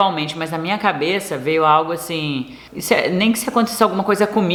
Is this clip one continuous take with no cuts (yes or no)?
yes